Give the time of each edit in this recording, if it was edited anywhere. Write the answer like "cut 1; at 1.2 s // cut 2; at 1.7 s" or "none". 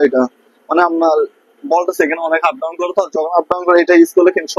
none